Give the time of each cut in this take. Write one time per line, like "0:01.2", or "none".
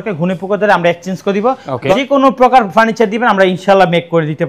0:01.9